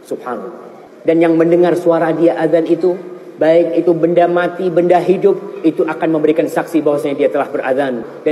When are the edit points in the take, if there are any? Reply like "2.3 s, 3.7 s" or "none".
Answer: none